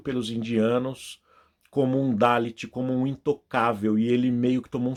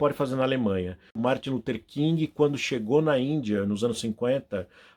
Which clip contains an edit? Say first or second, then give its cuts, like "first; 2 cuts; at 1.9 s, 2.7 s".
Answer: second; 1 cut; at 1.1 s